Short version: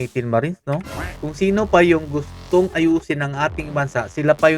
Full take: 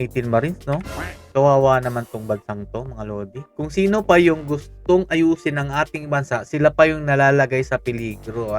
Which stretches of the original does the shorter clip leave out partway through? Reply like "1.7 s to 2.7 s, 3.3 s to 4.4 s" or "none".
1.1 s to 3.4 s